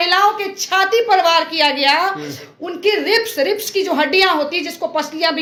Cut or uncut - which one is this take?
uncut